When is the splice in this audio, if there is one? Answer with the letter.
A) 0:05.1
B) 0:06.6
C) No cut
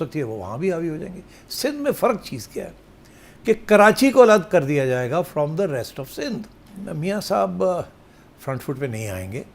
B